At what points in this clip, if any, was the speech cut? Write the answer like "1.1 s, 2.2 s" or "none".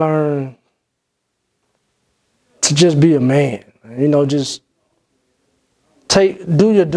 none